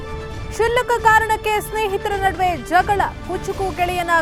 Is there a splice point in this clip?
no; 0 cuts

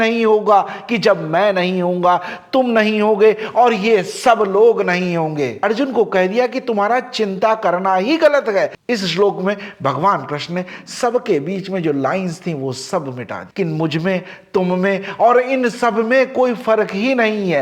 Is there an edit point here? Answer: no; 0 cuts

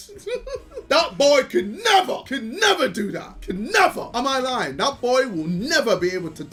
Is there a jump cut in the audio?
no; 0 cuts

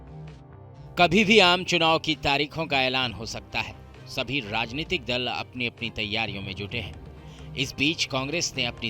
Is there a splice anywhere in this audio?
yes; 1 cut; at 0.9 s

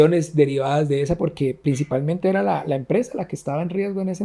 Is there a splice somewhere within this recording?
no; 0 cuts

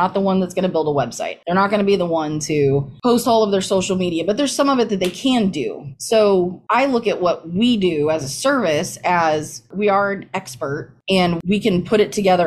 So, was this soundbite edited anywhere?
no; 0 cuts

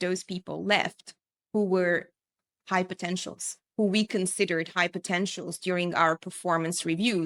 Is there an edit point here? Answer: no; 0 cuts

